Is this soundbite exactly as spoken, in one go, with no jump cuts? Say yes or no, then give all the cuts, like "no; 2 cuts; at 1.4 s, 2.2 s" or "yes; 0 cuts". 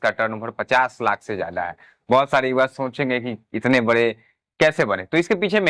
yes; 0 cuts